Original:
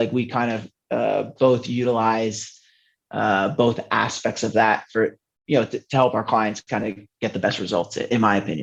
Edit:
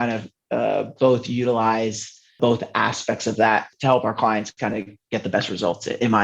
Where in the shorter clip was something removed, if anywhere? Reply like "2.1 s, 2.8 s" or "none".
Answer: 2.4 s, 3.7 s